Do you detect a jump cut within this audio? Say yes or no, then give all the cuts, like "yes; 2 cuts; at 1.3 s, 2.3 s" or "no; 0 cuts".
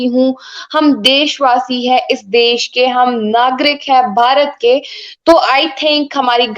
no; 0 cuts